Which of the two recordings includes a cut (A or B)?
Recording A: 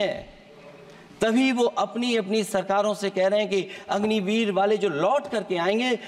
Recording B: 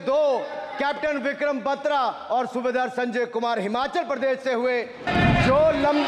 B